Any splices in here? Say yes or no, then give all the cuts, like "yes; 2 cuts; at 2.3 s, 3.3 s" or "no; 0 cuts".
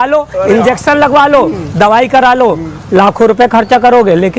no; 0 cuts